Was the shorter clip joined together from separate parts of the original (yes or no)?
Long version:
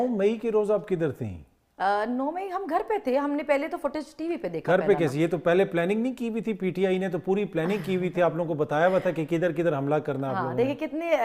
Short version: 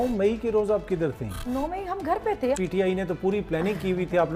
yes